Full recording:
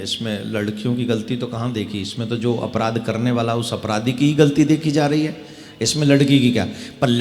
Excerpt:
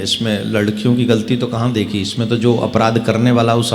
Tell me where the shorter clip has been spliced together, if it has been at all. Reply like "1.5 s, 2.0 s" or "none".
none